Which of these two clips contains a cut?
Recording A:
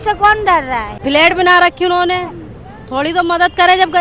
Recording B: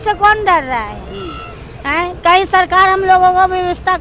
A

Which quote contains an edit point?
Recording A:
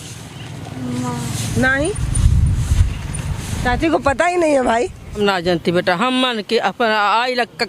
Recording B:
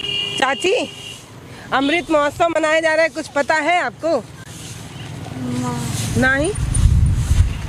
A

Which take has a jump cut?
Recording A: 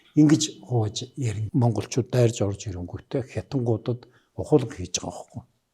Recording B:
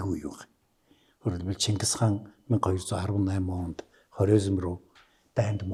A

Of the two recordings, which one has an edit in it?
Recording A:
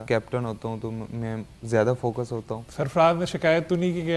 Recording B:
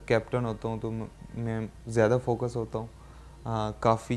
A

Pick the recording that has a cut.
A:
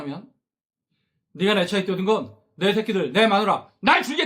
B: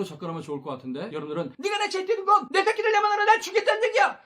B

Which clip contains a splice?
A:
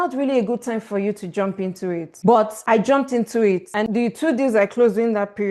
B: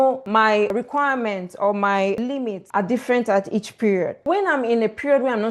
B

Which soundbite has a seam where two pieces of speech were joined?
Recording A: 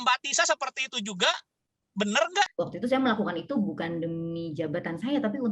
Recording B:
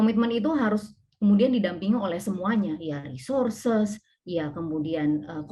A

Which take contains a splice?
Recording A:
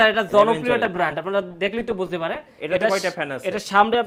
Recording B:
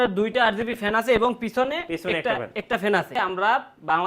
B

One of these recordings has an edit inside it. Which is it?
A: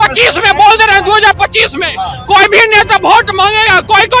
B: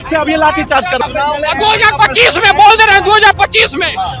B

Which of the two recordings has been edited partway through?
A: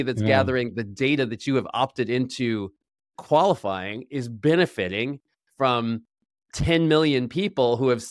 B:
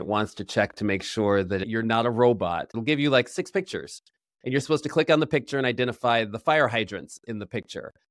B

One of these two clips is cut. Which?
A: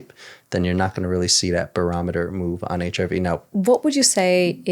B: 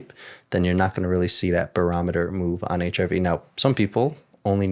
A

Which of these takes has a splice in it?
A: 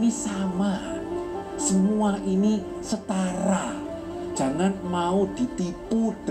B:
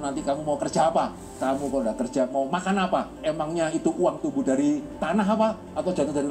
B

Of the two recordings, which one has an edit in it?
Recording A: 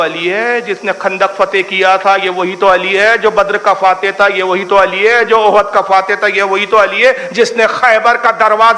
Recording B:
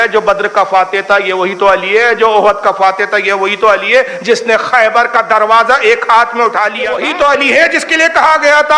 B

